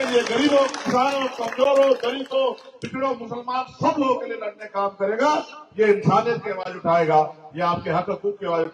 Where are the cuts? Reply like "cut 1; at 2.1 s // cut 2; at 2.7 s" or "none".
none